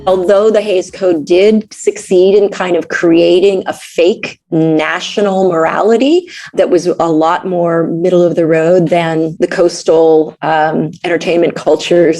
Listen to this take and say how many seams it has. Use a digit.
3